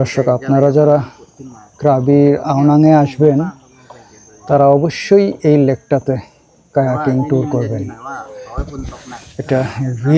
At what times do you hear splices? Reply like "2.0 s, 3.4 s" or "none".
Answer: none